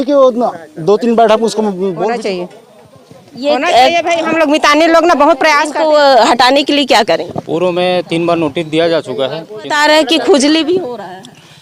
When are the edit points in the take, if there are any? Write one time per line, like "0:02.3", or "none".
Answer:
0:02.1
0:05.7
0:09.7